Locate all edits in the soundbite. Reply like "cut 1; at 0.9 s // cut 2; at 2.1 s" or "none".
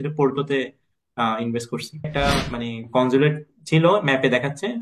cut 1; at 2.1 s